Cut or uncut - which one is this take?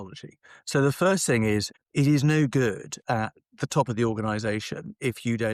cut